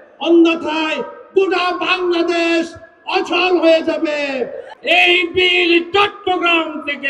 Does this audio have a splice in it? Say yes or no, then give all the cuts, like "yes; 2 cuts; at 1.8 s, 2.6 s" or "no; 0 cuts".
yes; 1 cut; at 4.6 s